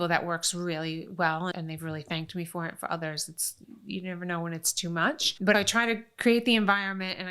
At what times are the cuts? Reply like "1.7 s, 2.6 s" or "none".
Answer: 1.5 s, 3.5 s, 5.5 s